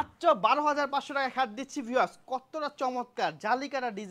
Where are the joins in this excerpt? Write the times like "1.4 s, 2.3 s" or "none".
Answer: none